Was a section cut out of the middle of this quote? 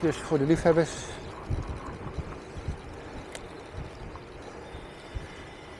no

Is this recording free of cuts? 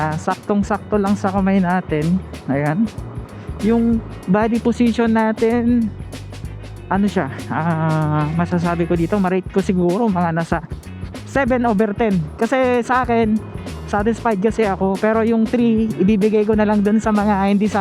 yes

